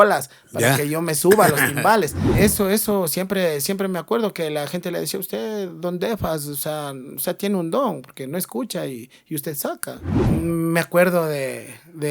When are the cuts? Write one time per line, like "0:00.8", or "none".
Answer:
0:02.3
0:10.1